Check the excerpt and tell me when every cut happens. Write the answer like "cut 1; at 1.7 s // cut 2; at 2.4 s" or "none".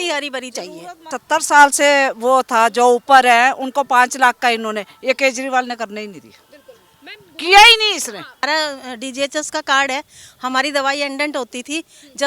cut 1; at 1.1 s // cut 2; at 8.4 s